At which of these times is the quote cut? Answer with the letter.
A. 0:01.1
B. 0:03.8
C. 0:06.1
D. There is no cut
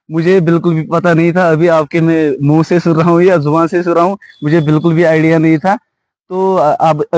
D